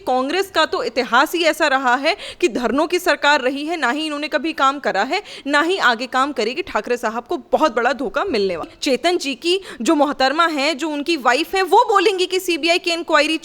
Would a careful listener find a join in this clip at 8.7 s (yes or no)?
yes